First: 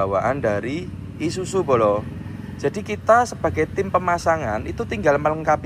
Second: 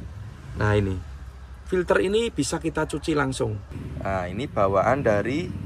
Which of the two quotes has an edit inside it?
second; 1 cut; at 3.7 s

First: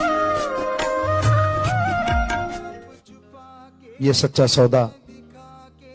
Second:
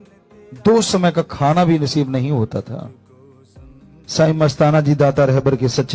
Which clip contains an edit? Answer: first; 1 cut; at 4.9 s

